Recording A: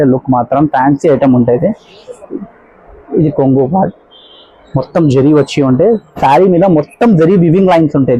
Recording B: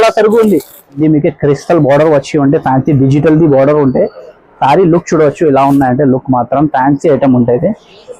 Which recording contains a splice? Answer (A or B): B